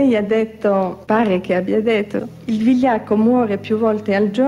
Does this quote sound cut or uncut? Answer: cut